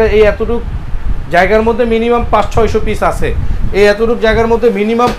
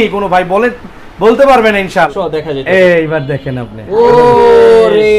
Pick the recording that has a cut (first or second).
second